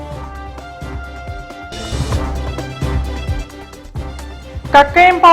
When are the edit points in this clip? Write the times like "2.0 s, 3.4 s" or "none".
4.2 s